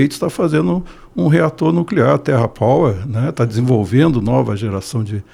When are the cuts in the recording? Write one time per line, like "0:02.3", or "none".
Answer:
none